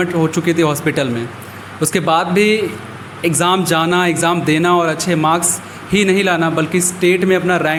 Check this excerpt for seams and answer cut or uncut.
uncut